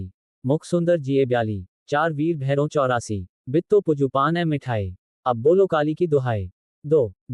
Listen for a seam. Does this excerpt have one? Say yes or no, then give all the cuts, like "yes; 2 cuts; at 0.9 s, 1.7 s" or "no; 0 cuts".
yes; 1 cut; at 0.9 s